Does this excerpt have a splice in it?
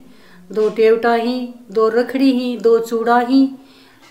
no; 0 cuts

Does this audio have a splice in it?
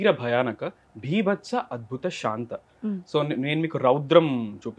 no; 0 cuts

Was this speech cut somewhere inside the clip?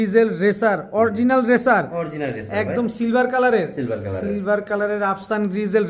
no; 0 cuts

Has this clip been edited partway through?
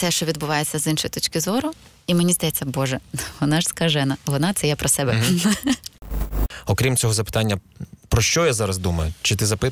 yes; 1 cut; at 6.4 s

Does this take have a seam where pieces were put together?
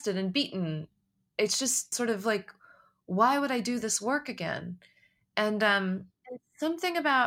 yes; 1 cut; at 1.9 s

